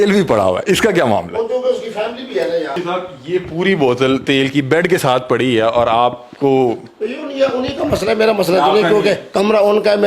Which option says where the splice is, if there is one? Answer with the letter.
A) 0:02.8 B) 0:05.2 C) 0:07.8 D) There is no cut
A